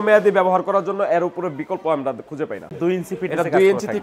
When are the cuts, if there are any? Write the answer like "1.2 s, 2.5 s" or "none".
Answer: 2.7 s